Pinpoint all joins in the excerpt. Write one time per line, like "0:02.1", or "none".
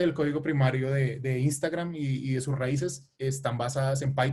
none